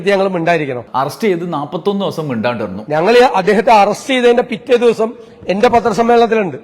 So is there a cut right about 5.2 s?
no; 1 cut; at 2.7 s

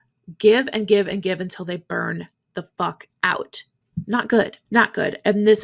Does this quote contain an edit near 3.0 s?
no; 1 cut; at 4.6 s

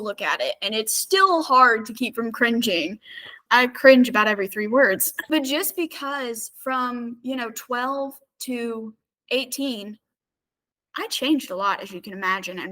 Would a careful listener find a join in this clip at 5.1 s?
yes; 2 cuts; at 3.4 s, 5.1 s

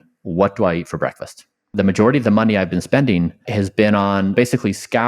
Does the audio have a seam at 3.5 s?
yes; 3 cuts; at 1.7 s, 3.5 s, 4.3 s

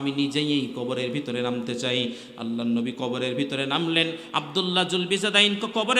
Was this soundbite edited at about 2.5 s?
no; 0 cuts

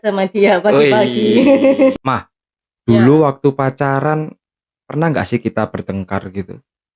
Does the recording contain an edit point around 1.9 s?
yes; 1 cut; at 1.9 s

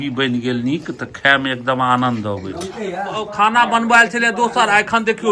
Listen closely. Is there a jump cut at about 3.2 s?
yes; 1 cut; at 3.2 s

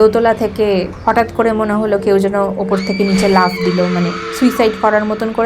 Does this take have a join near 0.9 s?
yes; 1 cut; at 0.9 s

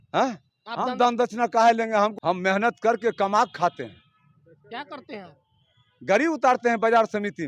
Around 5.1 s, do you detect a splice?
no; 1 cut; at 2.1 s

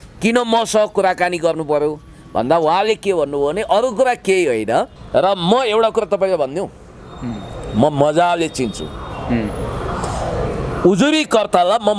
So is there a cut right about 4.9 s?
yes; 1 cut; at 4.9 s

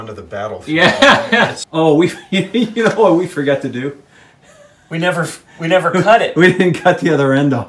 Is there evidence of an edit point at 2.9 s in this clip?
no; 1 cut; at 1.6 s

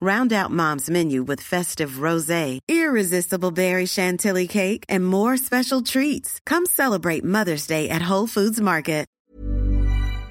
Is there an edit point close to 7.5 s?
no; 1 cut; at 9.2 s

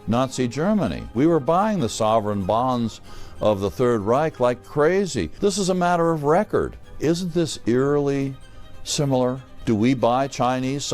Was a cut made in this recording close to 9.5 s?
yes; 4 cuts; at 1.1 s, 5.3 s, 6.8 s, 9.5 s

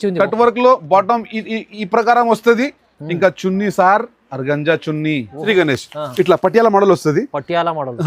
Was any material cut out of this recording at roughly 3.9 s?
no; 1 cut; at 5.4 s

